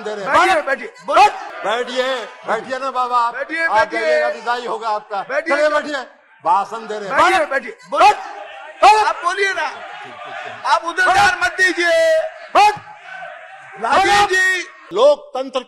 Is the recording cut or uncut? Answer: cut